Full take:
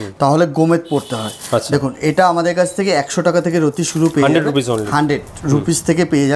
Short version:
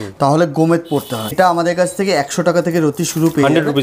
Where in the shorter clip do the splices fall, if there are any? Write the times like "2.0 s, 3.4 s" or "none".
1.3 s